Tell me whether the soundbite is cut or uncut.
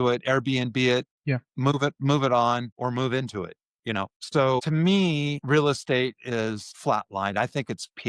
cut